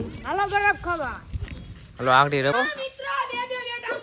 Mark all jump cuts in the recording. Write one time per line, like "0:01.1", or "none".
0:02.5